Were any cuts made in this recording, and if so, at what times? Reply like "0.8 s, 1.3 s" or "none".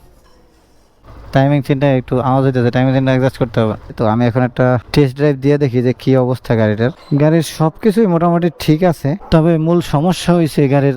1.1 s, 4.0 s, 7.0 s